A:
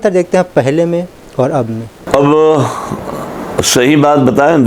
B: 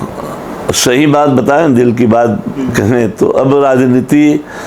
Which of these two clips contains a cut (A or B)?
A